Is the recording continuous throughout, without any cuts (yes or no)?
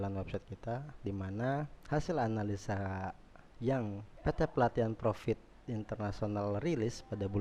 no